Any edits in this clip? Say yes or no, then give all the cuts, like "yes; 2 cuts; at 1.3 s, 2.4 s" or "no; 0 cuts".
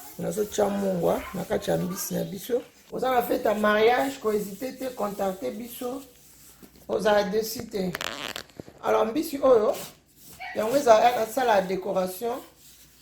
yes; 1 cut; at 2.8 s